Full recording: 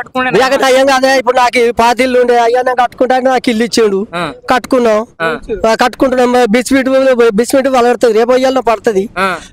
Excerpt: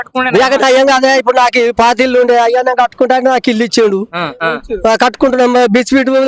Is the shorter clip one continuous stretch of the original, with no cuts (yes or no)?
no